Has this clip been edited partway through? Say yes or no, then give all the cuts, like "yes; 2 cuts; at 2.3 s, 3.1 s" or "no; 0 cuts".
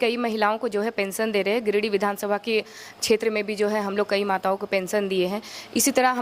no; 0 cuts